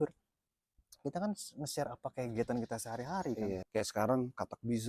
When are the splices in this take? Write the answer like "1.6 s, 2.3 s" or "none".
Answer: 3.6 s